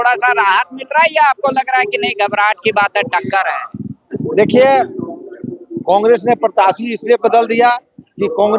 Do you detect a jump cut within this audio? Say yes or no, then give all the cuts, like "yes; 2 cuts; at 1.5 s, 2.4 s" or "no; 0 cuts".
no; 0 cuts